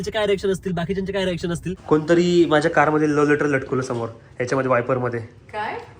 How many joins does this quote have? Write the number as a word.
one